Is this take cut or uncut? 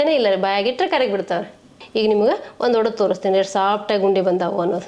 cut